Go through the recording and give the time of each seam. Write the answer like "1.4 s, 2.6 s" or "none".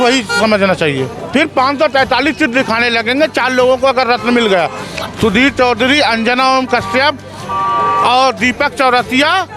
1.1 s